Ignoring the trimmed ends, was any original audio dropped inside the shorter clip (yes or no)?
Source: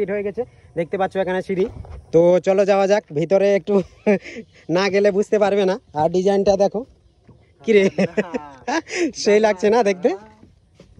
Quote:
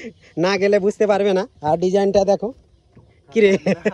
no